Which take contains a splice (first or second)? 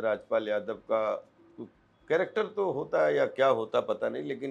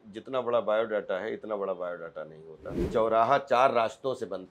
second